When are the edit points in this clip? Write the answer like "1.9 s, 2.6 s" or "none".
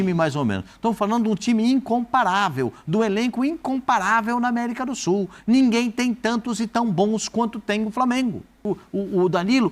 8.6 s